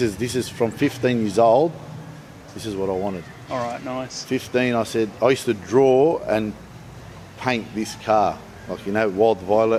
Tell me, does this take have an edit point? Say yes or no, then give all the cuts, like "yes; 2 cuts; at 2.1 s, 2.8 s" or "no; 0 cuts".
no; 0 cuts